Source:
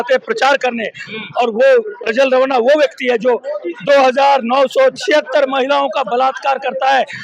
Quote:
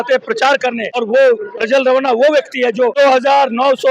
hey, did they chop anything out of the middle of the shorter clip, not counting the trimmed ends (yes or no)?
yes